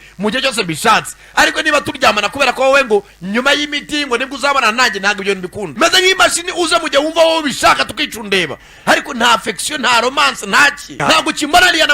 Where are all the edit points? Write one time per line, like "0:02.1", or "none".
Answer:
0:05.7